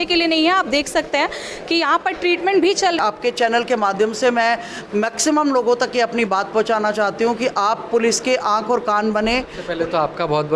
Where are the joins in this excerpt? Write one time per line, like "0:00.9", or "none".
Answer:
0:03.0
0:09.6